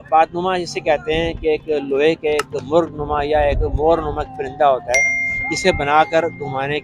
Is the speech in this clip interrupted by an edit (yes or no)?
no